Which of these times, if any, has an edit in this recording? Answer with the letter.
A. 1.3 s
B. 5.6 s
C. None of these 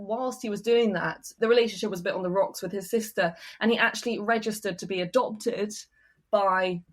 A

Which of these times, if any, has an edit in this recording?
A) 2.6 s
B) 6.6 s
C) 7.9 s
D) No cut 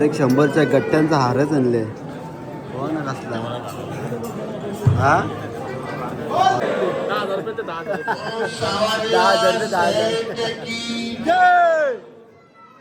B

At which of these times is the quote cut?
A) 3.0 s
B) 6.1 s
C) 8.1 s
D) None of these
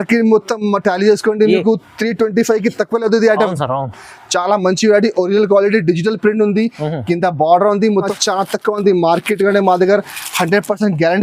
C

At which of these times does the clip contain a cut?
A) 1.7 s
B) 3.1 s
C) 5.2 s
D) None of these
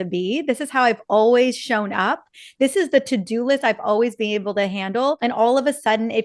C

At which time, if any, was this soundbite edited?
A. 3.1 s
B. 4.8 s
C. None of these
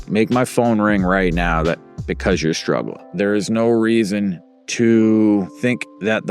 A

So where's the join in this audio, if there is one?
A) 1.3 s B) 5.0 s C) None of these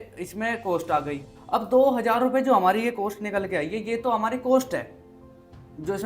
A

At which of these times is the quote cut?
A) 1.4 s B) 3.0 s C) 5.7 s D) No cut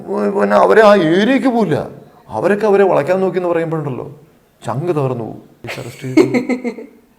C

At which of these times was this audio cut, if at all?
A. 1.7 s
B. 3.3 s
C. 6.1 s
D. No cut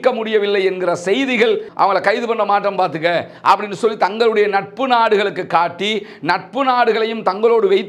A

